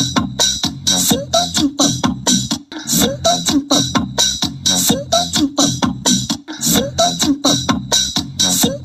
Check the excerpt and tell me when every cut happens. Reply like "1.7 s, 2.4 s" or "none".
2.4 s, 6.4 s